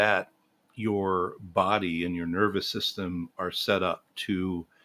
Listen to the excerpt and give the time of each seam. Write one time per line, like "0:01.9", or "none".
none